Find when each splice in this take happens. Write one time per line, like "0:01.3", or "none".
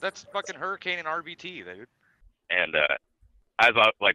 none